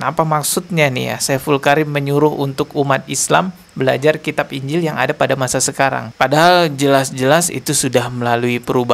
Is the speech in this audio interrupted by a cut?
no; 0 cuts

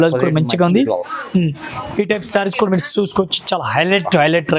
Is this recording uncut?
yes; 0 cuts

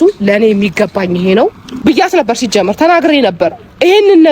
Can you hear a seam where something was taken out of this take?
yes; 1 cut; at 1.7 s

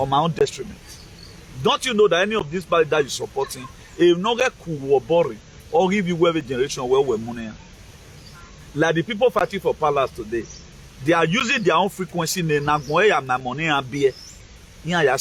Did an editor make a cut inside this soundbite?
no; 0 cuts

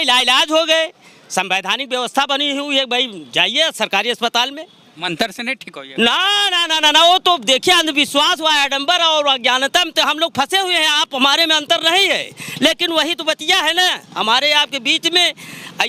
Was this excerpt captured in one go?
yes; 0 cuts

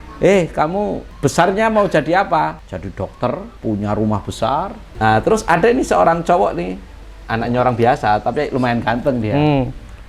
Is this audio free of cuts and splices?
no; 4 cuts; at 1.1 s, 2.7 s, 3.5 s, 4.8 s

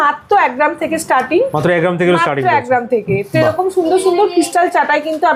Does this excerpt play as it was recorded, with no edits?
yes; 0 cuts

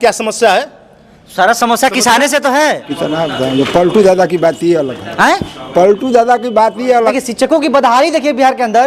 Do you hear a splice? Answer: yes; 2 cuts; at 2.9 s, 7.1 s

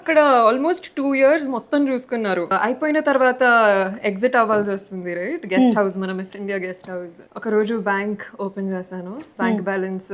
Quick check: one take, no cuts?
no; 2 cuts; at 2.5 s, 7.2 s

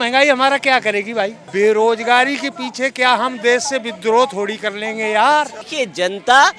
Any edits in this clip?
yes; 2 cuts; at 1.4 s, 5.6 s

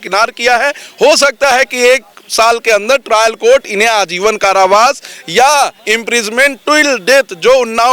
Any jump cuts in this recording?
no; 0 cuts

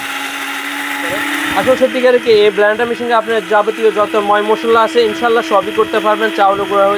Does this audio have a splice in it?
yes; 1 cut; at 1.4 s

